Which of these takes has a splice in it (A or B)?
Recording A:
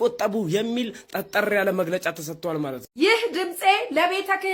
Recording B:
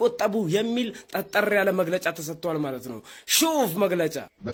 A